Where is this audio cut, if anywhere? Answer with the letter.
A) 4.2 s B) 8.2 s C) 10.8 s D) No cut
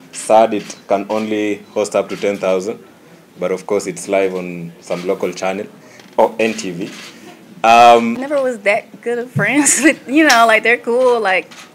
B